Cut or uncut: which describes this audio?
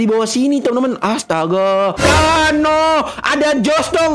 cut